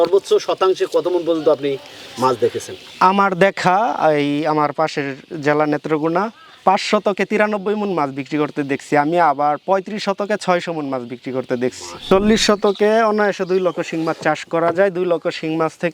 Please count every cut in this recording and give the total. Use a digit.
1